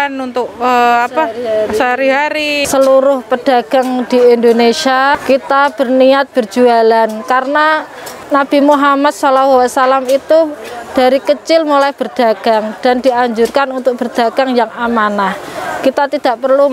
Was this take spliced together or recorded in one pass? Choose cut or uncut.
cut